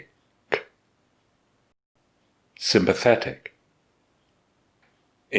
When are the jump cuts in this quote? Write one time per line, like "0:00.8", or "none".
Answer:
none